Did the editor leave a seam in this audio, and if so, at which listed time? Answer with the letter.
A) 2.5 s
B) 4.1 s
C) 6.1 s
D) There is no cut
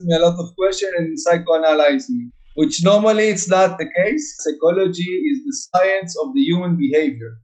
B